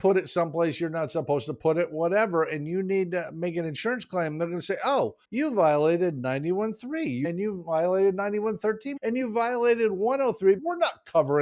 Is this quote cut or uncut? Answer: cut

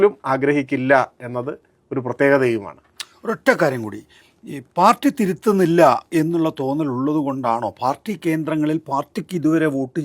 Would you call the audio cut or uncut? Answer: uncut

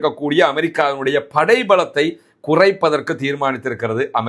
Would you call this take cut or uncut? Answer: uncut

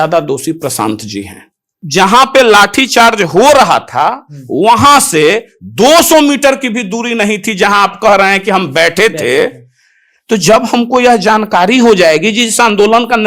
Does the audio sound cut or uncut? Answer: cut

